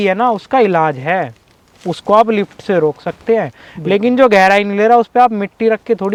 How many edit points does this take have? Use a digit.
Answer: 0